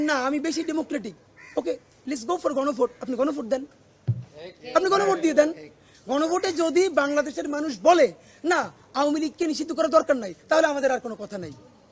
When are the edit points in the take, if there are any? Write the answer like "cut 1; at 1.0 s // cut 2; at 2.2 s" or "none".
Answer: none